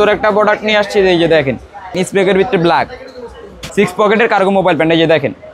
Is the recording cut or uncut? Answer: cut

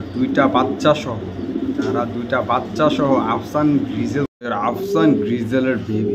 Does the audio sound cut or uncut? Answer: cut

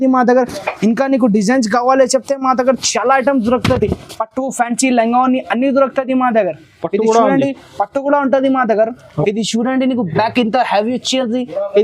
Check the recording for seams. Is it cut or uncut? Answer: cut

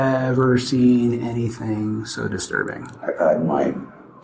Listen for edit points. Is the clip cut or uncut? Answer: cut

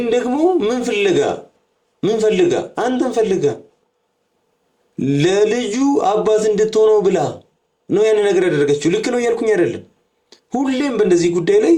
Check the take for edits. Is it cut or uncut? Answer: uncut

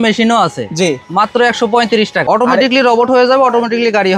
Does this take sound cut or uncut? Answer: cut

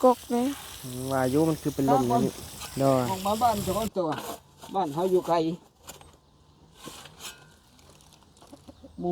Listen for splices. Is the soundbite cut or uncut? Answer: cut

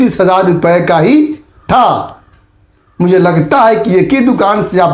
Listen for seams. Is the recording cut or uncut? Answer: uncut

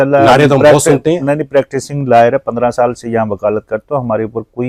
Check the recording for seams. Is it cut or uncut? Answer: uncut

